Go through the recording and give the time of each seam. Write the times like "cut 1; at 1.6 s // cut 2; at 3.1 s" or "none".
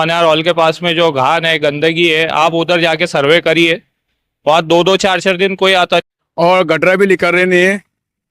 cut 1; at 6.1 s

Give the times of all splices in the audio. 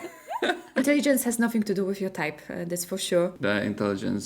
cut 1; at 3.4 s

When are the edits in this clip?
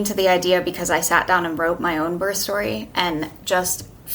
none

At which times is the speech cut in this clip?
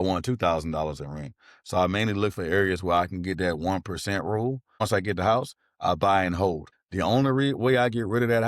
cut 1; at 4.8 s // cut 2; at 6.7 s

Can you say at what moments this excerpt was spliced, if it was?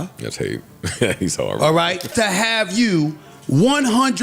none

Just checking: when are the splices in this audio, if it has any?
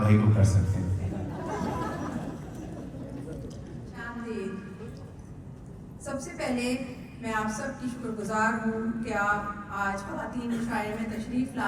none

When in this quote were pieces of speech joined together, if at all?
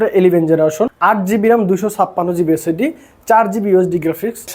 cut 1; at 1.0 s

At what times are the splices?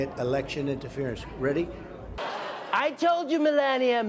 cut 1; at 2.2 s

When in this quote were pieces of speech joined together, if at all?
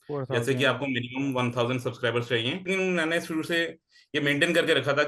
cut 1; at 2.6 s

